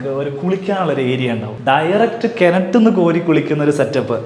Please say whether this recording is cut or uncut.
cut